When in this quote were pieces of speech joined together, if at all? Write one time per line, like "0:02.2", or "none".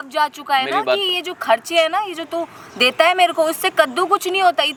none

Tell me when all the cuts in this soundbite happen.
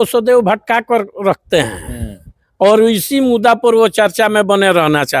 none

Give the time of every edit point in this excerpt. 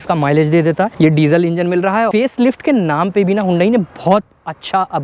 0:00.9
0:02.1

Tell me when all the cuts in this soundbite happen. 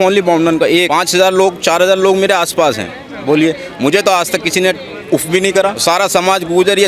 0:00.9
0:05.8

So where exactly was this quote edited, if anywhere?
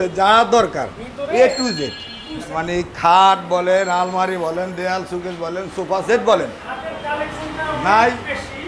0:02.6

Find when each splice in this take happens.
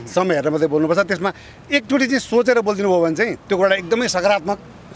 none

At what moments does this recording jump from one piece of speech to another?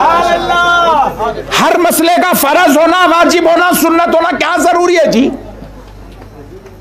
none

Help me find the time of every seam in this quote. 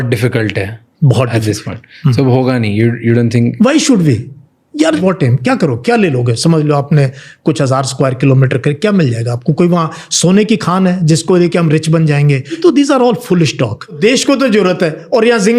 0:05.0
0:12.5
0:14.0

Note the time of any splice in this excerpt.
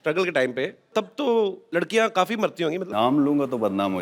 0:00.9
0:01.6
0:02.9

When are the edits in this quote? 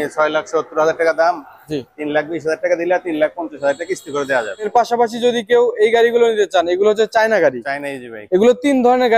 0:04.7

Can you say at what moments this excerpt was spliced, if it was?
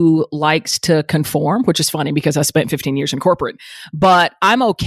none

